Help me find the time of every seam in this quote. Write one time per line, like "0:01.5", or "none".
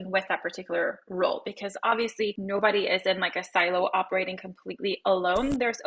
0:02.4